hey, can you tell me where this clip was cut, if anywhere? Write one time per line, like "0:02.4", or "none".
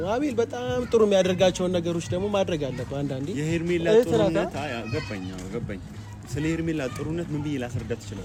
none